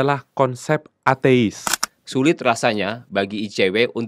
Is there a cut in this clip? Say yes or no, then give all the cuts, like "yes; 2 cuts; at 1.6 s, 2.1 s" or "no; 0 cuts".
yes; 1 cut; at 1.9 s